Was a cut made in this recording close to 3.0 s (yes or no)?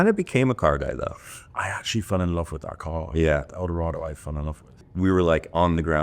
no